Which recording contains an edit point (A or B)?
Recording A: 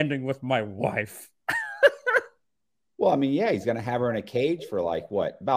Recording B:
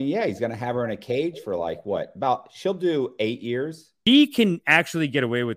B